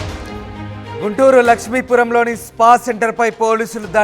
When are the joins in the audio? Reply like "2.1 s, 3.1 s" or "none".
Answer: 1.0 s